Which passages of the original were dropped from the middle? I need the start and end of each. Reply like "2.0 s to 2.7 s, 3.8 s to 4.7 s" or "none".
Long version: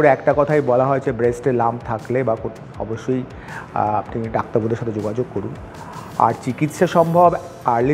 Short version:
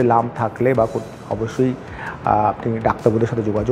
none